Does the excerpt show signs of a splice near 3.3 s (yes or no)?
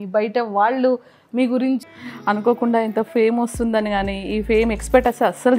no